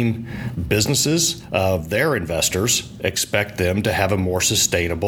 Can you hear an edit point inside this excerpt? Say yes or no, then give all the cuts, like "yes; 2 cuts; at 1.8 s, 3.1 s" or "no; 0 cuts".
yes; 1 cut; at 1.5 s